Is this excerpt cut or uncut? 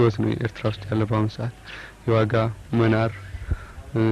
uncut